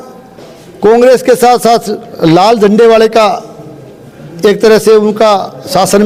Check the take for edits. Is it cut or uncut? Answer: uncut